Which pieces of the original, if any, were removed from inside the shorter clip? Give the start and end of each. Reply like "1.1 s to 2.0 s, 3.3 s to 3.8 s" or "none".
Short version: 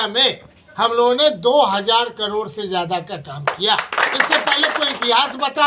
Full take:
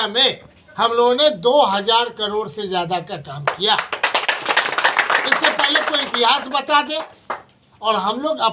3.9 s to 5.1 s